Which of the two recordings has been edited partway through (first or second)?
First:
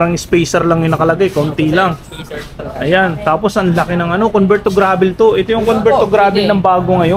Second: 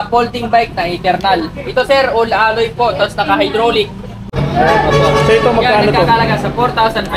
second